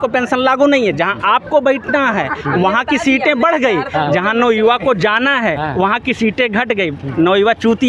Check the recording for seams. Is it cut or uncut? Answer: uncut